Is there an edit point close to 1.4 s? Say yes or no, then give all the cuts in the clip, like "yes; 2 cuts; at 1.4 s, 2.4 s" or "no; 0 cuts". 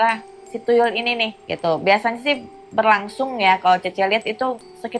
yes; 1 cut; at 1.4 s